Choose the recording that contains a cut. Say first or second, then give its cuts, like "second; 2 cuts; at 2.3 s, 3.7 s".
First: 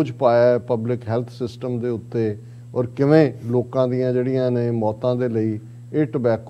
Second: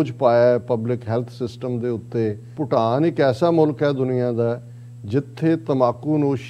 second; 1 cut; at 2.5 s